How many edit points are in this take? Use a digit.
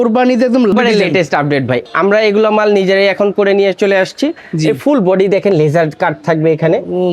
2